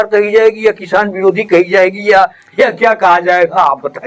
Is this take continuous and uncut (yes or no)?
yes